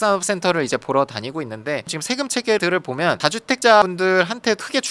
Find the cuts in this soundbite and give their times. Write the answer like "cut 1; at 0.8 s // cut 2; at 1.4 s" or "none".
cut 1; at 1.9 s